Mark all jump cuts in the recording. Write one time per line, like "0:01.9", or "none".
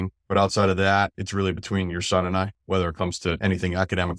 none

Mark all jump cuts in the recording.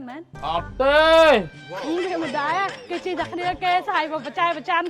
0:01.7

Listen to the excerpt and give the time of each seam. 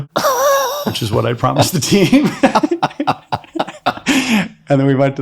0:02.7

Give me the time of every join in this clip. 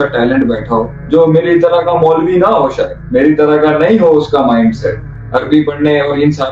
0:01.0
0:02.9

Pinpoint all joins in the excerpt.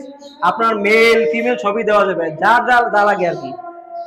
none

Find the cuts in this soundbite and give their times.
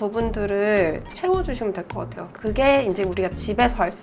0:01.1
0:02.3

